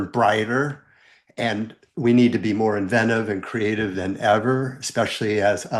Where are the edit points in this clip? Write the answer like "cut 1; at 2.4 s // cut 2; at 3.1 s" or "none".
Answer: none